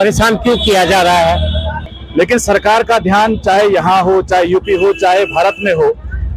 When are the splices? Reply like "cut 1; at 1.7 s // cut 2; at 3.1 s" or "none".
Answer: cut 1; at 1.8 s